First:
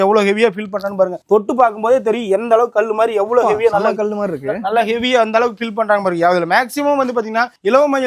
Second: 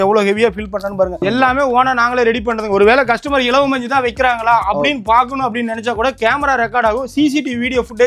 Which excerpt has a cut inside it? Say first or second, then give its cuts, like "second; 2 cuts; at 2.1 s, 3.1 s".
second; 1 cut; at 1.2 s